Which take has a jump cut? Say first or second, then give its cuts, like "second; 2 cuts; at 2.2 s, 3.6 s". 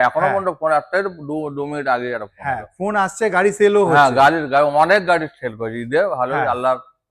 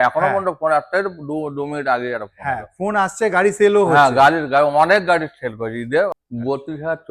second; 1 cut; at 6.1 s